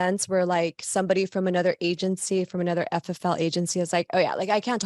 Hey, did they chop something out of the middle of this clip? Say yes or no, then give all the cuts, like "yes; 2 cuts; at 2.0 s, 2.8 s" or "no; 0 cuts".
no; 0 cuts